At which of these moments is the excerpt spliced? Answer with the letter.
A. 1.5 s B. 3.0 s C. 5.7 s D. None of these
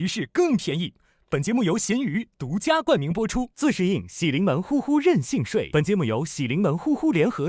C